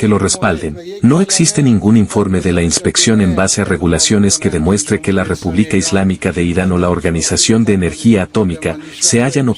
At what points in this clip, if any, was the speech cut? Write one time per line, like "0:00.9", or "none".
none